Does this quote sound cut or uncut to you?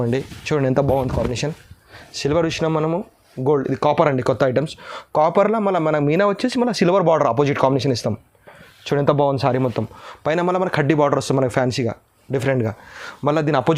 uncut